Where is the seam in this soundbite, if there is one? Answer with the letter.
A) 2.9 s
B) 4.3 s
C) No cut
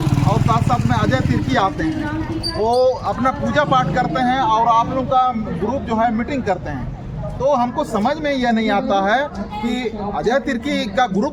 C